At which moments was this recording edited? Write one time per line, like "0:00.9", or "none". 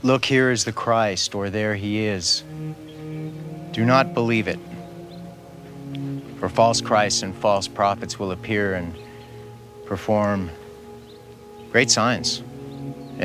none